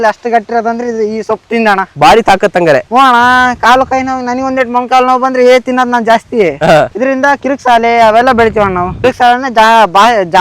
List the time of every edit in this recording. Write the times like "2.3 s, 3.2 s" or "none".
1.9 s